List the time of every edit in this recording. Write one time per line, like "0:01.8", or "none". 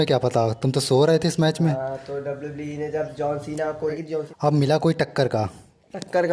0:04.0

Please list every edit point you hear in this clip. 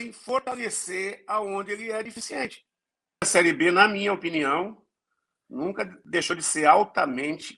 0:03.3

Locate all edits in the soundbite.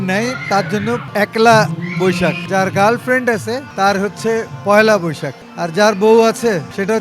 0:01.1
0:02.4
0:03.7

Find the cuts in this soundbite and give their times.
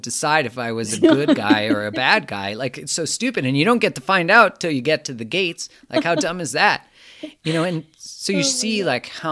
none

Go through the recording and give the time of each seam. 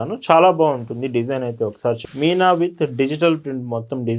0:02.0

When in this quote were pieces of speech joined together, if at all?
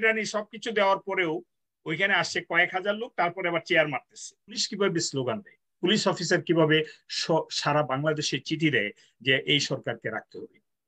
0:04.6

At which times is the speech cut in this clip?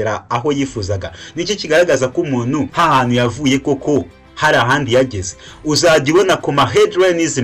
0:02.7

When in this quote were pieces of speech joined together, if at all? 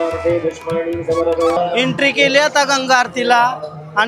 0:01.6

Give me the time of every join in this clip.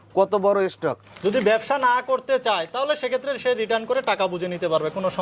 0:01.1

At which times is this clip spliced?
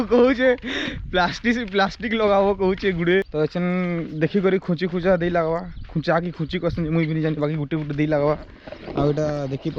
0:03.3

